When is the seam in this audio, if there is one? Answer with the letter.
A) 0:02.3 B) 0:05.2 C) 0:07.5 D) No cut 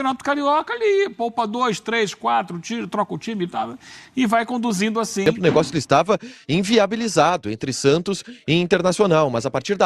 B